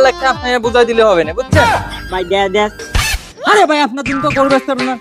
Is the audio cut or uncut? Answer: cut